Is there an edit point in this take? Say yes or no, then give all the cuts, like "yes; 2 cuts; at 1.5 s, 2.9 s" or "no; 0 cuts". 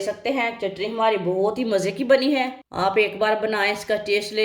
yes; 1 cut; at 2.6 s